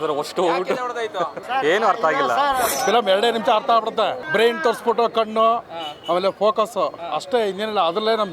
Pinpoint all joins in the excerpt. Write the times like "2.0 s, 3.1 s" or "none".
1.4 s, 2.7 s, 4.2 s